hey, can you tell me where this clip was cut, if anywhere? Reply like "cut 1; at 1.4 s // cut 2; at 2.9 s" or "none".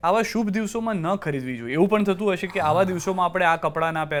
none